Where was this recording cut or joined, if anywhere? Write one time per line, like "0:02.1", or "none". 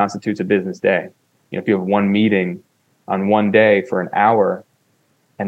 none